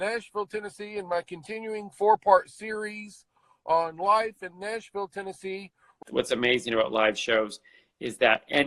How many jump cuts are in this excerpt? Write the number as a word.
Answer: one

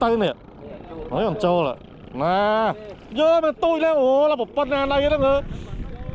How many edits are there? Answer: zero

